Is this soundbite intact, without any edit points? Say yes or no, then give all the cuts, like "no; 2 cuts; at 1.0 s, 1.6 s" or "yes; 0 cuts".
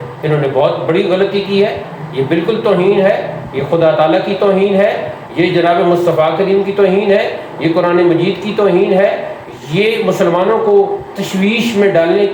yes; 0 cuts